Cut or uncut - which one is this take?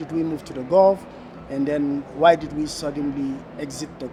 uncut